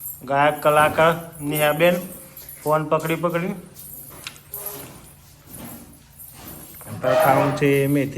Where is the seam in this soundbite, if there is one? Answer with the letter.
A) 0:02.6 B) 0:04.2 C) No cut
C